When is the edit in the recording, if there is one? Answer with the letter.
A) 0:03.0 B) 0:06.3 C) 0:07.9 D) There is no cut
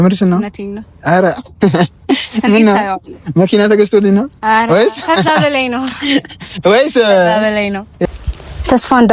C